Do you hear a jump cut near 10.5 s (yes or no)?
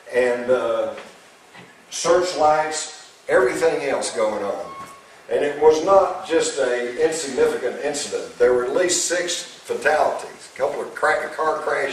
yes